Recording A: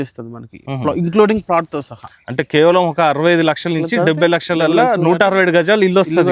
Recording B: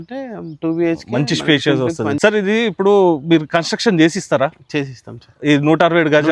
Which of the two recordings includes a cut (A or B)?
B